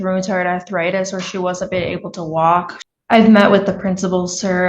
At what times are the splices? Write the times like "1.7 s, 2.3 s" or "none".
2.8 s